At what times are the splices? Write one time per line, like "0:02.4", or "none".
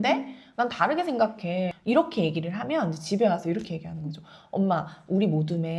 0:01.8